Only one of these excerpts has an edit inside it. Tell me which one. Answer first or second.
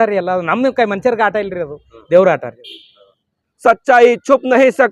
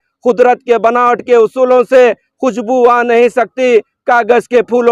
first